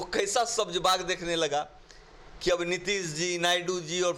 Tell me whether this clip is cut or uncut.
uncut